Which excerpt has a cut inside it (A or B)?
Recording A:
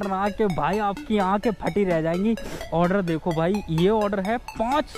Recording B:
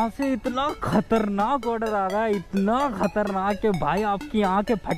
A